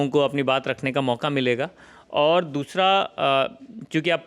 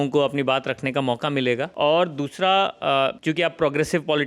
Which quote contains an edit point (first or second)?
second